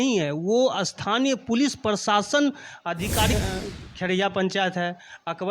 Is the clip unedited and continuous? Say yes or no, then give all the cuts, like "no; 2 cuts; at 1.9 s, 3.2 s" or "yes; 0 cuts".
no; 1 cut; at 3.3 s